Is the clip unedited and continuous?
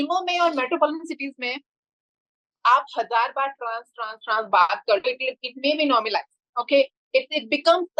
yes; 0 cuts

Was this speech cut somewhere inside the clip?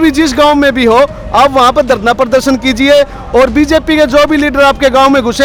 no; 0 cuts

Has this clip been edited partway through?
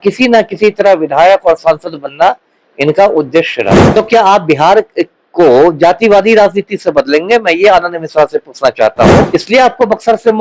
yes; 2 cuts; at 3.8 s, 9.3 s

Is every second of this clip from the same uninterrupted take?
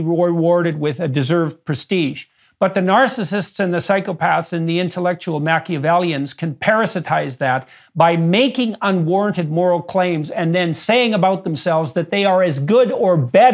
yes; 0 cuts

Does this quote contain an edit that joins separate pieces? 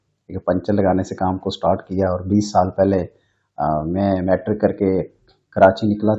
no; 0 cuts

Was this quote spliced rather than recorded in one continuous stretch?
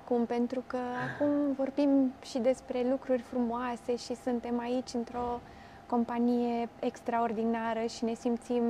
no; 0 cuts

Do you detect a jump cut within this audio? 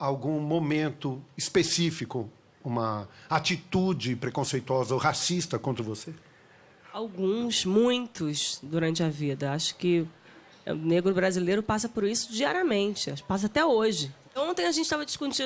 no; 0 cuts

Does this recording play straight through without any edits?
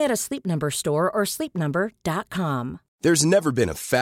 no; 1 cut; at 2.8 s

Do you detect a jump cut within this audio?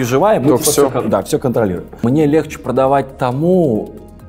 yes; 1 cut; at 2.0 s

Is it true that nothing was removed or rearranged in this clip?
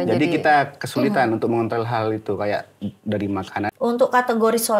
no; 1 cut; at 3.7 s

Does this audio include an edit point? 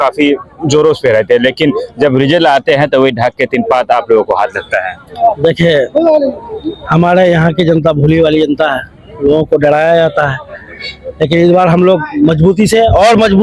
no; 0 cuts

